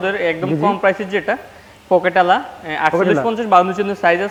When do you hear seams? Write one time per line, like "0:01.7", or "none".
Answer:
none